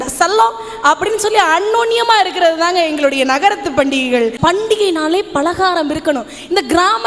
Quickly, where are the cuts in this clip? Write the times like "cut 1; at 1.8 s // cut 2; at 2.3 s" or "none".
cut 1; at 4.4 s